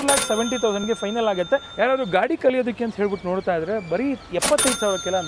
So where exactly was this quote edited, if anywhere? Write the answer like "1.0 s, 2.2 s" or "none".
1.7 s